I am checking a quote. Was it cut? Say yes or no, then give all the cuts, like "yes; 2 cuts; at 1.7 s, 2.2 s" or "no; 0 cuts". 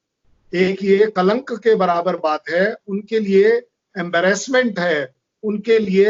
no; 0 cuts